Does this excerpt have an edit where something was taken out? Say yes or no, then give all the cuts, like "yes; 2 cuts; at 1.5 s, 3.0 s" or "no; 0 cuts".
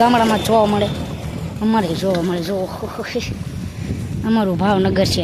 no; 0 cuts